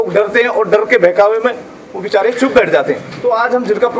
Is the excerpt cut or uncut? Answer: cut